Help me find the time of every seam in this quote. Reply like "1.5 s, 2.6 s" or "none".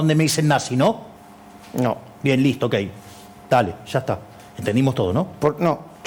none